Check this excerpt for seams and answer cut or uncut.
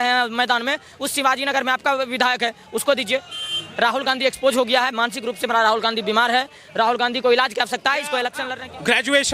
cut